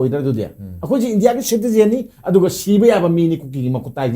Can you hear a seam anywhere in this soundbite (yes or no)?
no